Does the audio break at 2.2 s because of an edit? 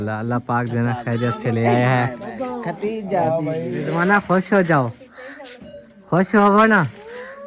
no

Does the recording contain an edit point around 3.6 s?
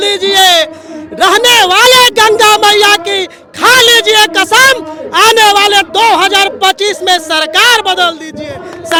no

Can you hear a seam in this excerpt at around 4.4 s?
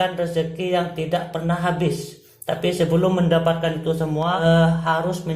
yes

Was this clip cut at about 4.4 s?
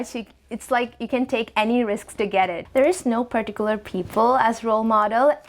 no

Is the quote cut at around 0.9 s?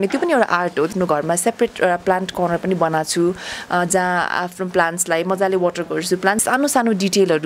yes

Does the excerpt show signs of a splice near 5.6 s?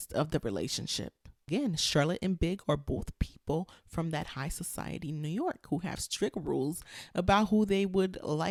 no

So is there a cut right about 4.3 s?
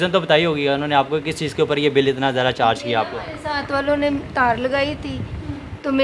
no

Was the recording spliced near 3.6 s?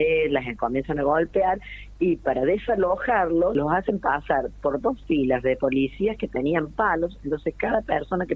yes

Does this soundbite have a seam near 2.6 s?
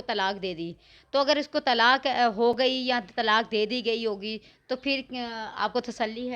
no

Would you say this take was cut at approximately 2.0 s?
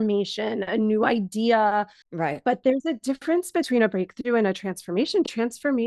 yes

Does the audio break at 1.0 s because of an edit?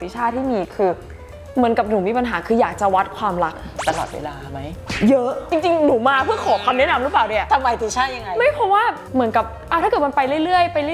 no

